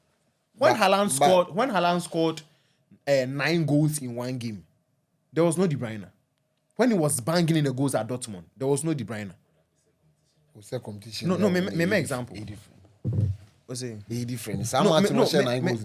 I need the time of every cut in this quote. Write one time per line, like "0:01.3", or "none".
none